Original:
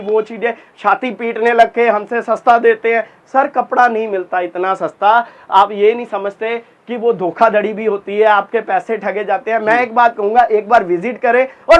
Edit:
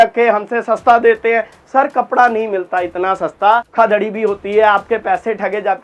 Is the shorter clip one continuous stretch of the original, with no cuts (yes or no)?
no